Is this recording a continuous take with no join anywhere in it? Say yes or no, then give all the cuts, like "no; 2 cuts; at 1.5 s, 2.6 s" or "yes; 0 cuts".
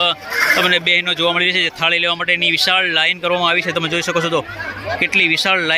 yes; 0 cuts